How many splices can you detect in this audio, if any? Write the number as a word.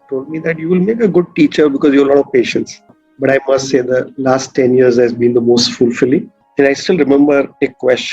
two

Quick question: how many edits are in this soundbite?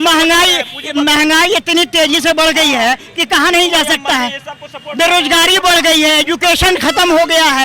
zero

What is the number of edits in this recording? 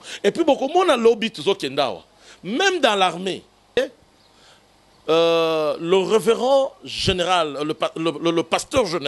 one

